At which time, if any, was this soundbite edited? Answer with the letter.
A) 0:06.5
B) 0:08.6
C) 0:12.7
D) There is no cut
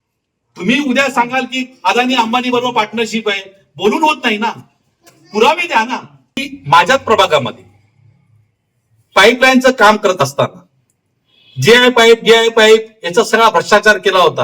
A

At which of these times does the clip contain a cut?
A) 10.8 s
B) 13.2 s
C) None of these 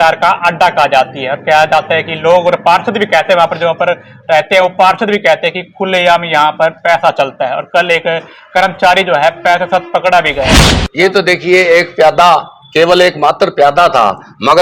A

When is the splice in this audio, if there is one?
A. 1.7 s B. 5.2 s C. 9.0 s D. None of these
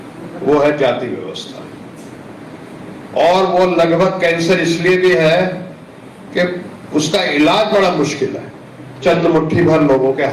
C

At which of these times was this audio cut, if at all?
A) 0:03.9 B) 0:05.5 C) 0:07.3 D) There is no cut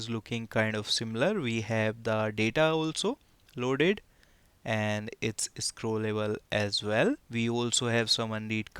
C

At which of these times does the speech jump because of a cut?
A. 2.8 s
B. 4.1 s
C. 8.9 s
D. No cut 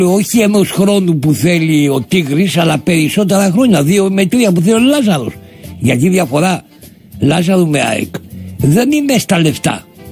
B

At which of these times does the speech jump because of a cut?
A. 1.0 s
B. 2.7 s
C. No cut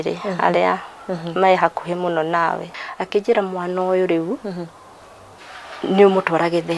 B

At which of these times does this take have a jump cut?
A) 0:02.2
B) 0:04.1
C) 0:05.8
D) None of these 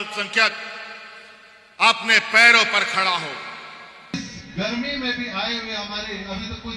B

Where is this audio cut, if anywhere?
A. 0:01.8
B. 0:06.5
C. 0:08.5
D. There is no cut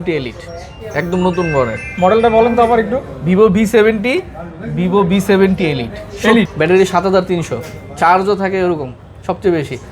B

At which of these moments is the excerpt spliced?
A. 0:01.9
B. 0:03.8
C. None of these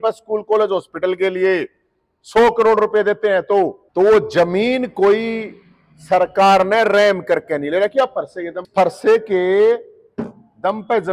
B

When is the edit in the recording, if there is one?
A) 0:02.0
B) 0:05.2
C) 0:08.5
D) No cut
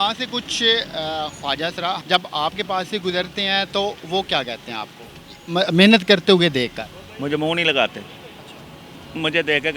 A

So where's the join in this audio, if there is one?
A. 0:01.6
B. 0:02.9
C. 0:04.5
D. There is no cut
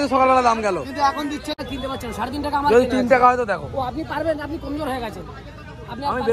A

